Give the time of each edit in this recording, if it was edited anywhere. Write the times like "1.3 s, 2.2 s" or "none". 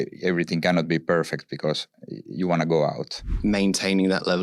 3.3 s